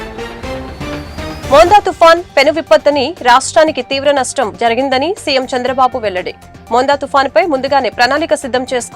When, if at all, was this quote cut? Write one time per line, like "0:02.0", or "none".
0:01.2